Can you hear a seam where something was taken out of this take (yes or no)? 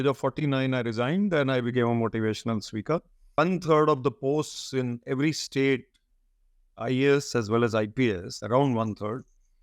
yes